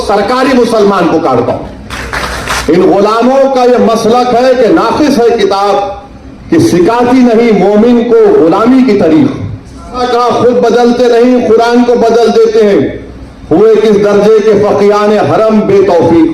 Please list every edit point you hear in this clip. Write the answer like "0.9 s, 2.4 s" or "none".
2.5 s, 10.0 s